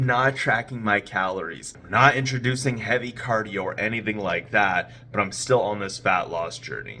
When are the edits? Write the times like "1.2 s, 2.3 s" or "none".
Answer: none